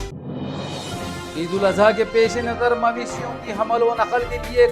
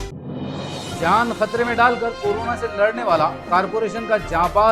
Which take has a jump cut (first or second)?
first